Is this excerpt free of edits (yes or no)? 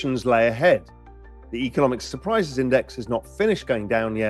yes